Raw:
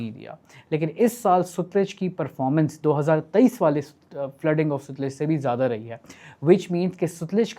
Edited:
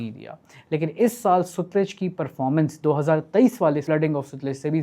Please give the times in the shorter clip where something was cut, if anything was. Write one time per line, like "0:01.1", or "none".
0:03.8